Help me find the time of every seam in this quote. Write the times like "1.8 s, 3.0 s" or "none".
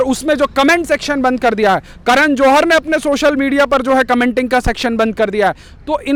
none